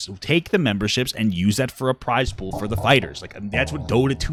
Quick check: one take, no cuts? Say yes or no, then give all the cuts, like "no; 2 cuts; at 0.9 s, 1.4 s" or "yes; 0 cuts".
yes; 0 cuts